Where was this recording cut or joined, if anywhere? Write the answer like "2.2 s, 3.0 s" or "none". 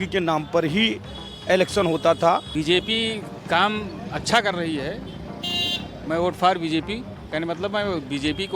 2.5 s